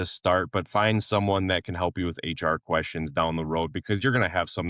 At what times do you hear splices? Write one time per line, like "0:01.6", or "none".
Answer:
none